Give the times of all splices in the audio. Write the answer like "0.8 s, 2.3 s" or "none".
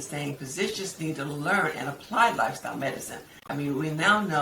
3.4 s